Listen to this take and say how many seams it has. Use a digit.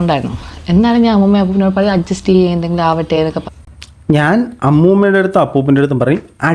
0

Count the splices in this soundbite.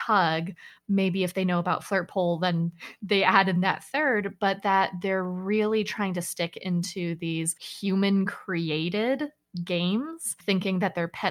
1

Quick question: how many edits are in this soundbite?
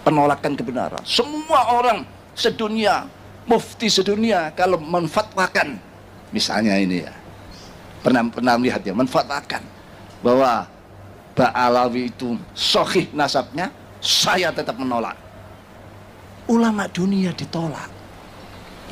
0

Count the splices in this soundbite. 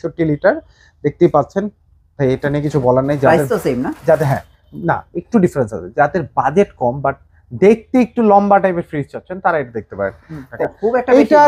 1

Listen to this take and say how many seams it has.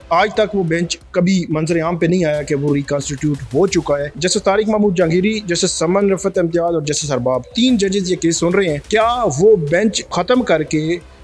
3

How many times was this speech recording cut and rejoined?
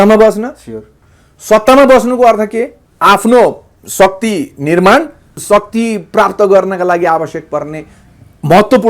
2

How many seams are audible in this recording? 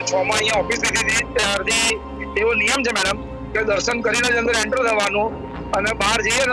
0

